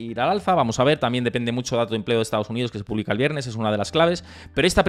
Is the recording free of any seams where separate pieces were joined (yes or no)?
yes